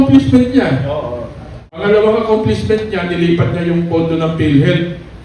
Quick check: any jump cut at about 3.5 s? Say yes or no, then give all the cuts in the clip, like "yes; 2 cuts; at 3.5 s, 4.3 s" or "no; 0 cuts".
no; 1 cut; at 1.7 s